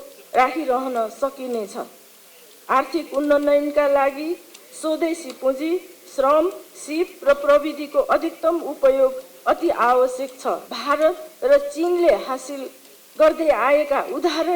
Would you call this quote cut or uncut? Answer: cut